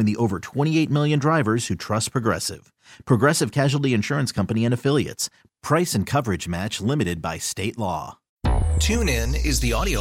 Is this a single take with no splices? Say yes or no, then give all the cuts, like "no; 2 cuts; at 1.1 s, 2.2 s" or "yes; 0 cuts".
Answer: no; 1 cut; at 8.2 s